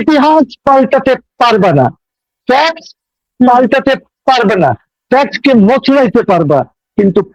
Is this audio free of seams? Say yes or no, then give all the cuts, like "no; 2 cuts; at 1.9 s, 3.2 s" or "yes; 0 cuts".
yes; 0 cuts